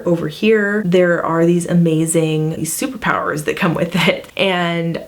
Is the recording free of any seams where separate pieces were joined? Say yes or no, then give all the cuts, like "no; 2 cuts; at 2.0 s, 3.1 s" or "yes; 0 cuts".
no; 3 cuts; at 0.8 s, 2.6 s, 4.3 s